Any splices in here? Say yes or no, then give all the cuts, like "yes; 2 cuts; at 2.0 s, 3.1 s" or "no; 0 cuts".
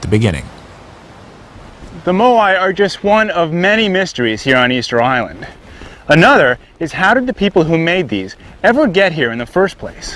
yes; 1 cut; at 9.0 s